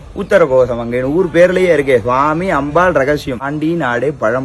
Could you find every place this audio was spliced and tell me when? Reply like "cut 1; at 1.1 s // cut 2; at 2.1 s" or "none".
cut 1; at 3.5 s